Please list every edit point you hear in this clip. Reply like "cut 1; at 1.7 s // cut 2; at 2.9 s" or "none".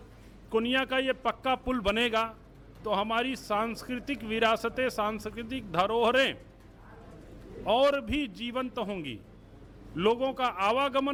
none

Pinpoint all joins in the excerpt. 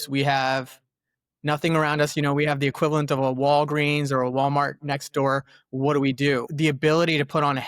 cut 1; at 6.5 s

